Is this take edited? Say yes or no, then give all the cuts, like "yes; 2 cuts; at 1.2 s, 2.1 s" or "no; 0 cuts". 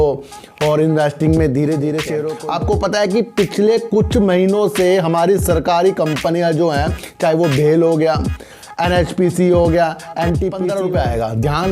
yes; 2 cuts; at 2.2 s, 10.6 s